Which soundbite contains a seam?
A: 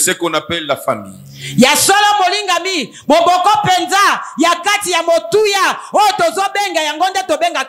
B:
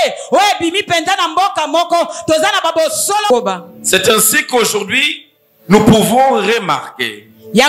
B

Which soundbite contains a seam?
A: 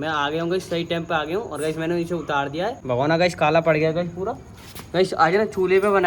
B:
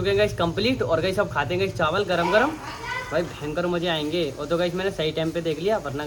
A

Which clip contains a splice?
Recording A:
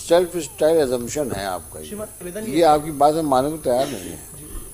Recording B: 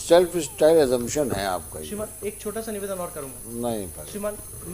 A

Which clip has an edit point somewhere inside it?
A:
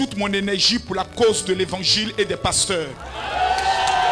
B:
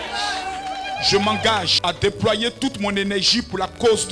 B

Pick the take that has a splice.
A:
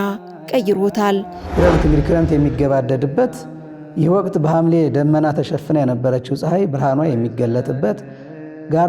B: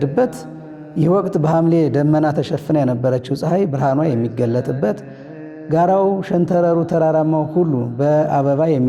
A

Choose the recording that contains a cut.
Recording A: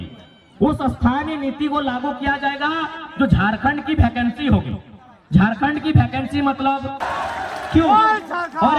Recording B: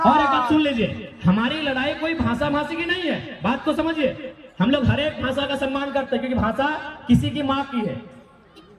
A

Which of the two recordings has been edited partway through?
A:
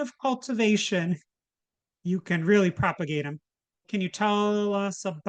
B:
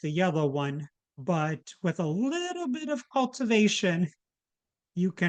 A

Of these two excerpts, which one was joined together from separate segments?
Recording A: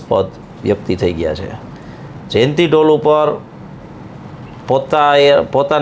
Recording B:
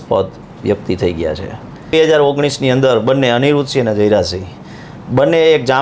B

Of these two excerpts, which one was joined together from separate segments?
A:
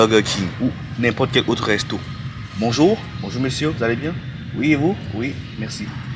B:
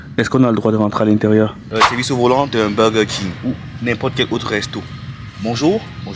B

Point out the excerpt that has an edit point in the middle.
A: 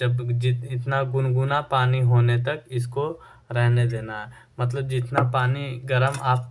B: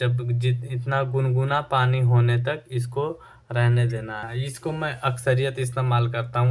B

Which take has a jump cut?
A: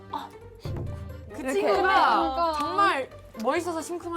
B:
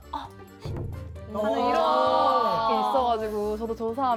A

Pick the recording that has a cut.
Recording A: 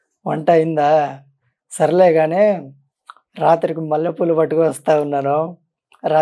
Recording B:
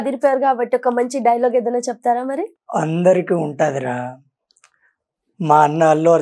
B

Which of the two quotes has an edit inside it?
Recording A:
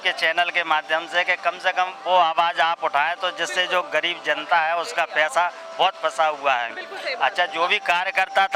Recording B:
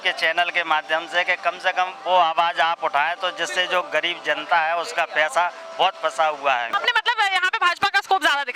B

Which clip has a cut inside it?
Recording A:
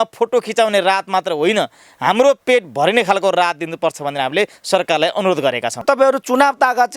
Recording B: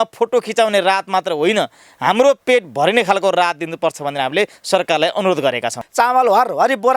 A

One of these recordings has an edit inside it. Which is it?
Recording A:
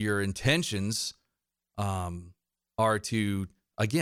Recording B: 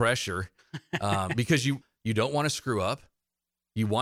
B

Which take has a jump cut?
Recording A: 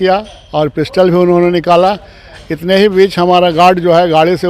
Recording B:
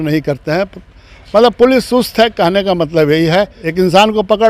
B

